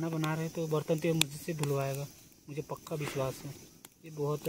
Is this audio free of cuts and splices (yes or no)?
yes